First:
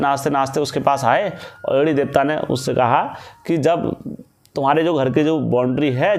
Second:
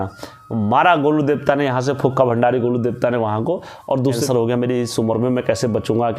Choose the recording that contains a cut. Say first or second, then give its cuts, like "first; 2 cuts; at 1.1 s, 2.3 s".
second; 1 cut; at 4.2 s